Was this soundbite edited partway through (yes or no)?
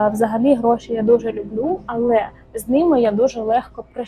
no